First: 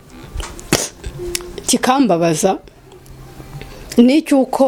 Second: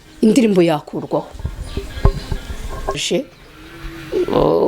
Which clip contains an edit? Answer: second; 1 cut; at 3.0 s

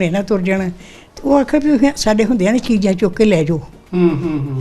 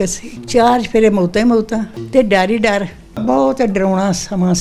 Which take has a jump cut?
second; 1 cut; at 3.1 s

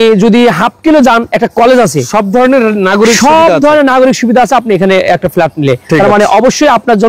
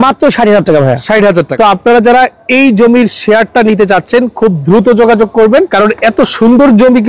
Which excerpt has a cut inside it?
second; 2 cuts; at 1.5 s, 5.7 s

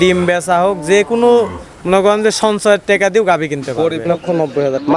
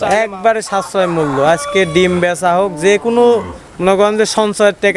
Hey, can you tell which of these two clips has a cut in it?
first; 1 cut; at 4.0 s

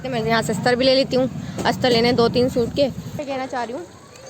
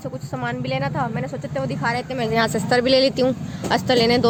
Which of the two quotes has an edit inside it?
first; 1 cut; at 3.2 s

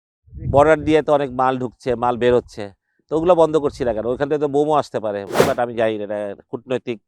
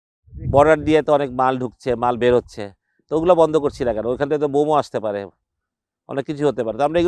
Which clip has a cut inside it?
first; 1 cut; at 5.4 s

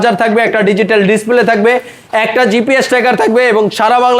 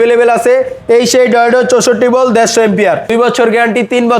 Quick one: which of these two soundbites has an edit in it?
second; 1 cut; at 3.1 s

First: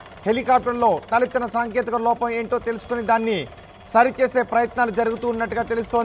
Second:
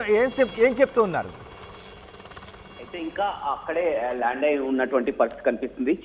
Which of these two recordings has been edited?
first; 1 cut; at 4.4 s

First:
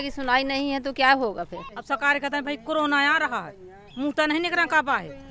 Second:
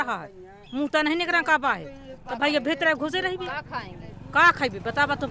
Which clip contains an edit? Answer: first; 1 cut; at 1.6 s

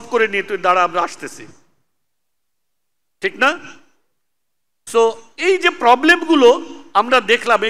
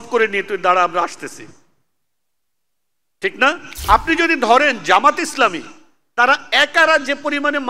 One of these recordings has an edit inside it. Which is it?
second; 1 cut; at 3.7 s

